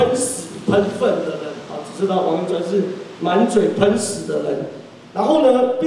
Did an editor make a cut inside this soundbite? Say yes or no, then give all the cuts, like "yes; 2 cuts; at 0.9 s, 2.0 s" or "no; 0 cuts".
no; 0 cuts